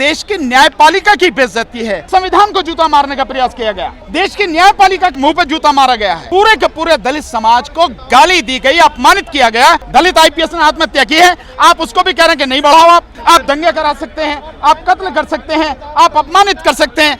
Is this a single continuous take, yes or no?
no